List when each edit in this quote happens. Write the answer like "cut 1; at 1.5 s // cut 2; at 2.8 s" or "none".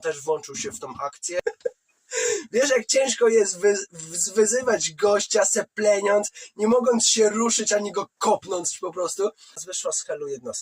cut 1; at 1.4 s // cut 2; at 9.6 s